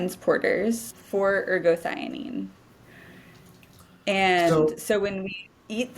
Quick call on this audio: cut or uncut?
cut